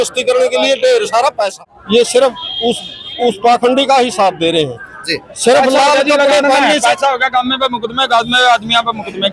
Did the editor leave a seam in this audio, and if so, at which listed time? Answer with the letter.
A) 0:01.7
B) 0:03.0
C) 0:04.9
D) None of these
A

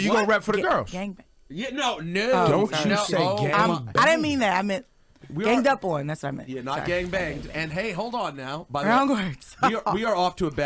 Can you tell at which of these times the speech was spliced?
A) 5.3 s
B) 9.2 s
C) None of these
A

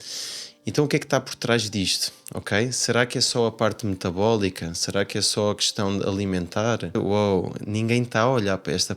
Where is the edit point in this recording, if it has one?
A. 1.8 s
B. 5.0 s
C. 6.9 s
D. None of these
C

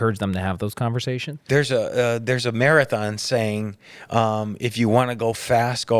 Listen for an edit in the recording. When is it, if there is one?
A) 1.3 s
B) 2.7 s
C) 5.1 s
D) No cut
A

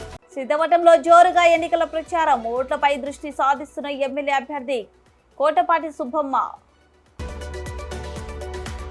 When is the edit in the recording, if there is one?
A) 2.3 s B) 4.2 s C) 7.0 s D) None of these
D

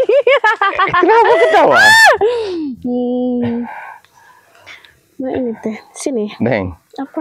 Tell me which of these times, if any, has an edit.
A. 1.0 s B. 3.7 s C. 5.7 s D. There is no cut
D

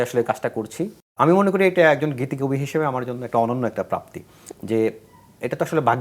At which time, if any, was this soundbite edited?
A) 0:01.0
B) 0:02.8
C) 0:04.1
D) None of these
A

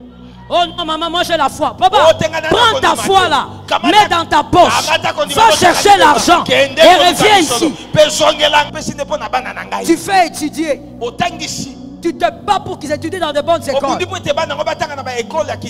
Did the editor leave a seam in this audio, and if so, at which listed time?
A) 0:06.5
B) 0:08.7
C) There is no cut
B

